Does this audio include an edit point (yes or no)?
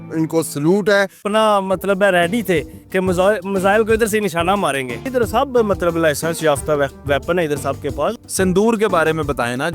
yes